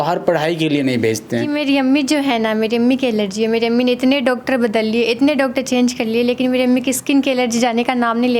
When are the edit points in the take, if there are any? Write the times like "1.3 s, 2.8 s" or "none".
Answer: 1.6 s